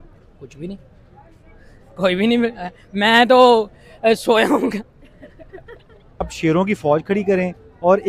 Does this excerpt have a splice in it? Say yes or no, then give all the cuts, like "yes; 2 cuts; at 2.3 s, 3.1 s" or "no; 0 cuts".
yes; 1 cut; at 6.0 s